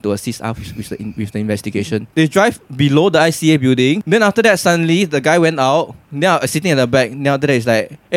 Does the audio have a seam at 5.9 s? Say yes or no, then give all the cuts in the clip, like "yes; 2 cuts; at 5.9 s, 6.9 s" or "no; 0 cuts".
no; 2 cuts; at 2.0 s, 4.0 s